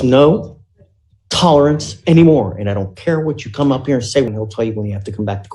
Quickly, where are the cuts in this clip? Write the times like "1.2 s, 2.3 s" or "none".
4.3 s